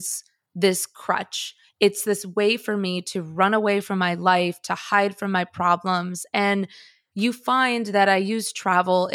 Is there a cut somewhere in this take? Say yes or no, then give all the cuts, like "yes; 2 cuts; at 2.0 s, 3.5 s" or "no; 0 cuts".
yes; 1 cut; at 2.0 s